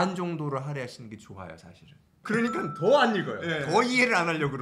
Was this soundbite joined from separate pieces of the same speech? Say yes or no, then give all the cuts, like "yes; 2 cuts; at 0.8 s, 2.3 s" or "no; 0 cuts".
yes; 1 cut; at 2.2 s